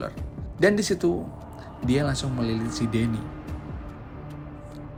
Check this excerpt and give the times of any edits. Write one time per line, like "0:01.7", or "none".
none